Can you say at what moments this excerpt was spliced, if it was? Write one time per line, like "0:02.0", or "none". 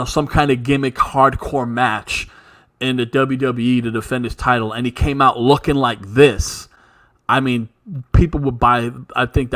none